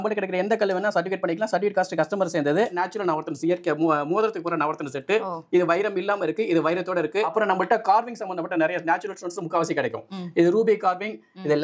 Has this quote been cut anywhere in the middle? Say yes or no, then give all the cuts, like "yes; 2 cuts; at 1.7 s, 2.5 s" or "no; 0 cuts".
yes; 2 cuts; at 2.8 s, 7.3 s